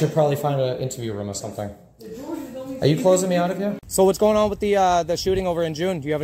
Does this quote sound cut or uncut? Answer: cut